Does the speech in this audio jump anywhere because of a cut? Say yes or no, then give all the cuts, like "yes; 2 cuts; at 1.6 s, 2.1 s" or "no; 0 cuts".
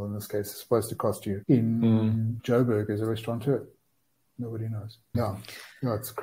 yes; 3 cuts; at 1.4 s, 2.3 s, 5.1 s